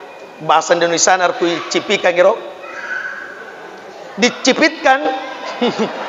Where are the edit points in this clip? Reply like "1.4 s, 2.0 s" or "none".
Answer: none